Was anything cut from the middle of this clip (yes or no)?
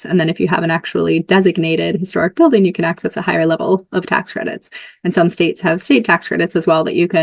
no